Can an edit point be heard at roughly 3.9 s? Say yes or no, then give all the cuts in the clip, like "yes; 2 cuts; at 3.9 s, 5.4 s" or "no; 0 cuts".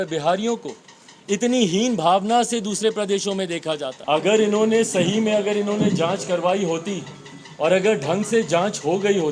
yes; 1 cut; at 3.9 s